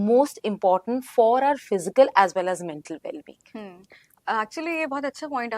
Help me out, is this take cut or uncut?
uncut